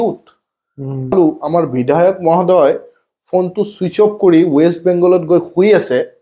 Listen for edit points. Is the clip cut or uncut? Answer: cut